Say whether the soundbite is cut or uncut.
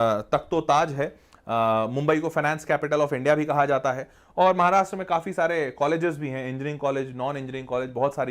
uncut